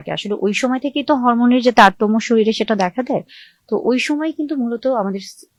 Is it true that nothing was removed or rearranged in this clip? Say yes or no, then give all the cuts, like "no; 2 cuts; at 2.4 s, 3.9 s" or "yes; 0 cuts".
yes; 0 cuts